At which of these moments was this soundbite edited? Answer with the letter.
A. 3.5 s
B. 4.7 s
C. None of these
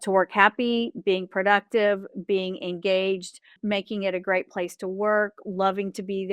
A